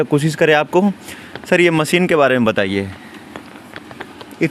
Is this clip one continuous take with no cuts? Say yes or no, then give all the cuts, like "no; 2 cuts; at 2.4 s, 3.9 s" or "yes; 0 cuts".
yes; 0 cuts